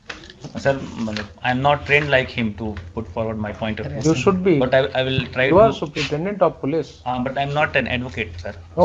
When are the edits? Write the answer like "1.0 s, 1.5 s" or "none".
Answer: none